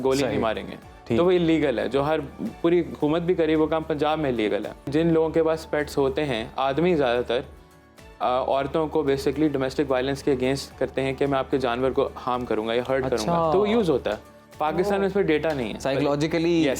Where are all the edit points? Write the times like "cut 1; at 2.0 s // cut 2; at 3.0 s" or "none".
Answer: cut 1; at 4.9 s